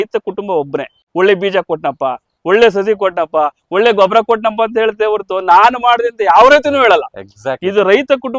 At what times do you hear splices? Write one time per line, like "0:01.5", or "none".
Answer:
0:01.0

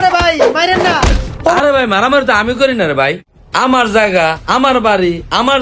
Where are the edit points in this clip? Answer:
0:01.6

